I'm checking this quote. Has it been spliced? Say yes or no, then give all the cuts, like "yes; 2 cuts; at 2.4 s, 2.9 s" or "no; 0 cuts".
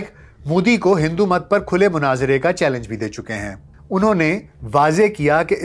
yes; 1 cut; at 3.7 s